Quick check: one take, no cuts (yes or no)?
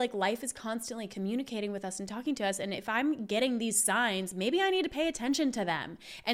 yes